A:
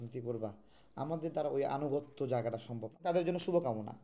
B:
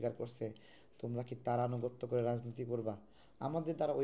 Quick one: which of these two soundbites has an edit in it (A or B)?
A